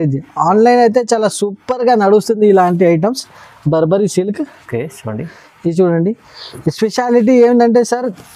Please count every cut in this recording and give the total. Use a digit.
0